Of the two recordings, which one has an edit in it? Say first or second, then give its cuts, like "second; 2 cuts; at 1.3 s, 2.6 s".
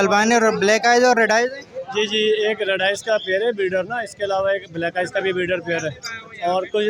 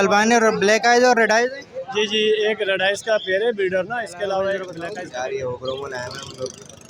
second; 1 cut; at 4.8 s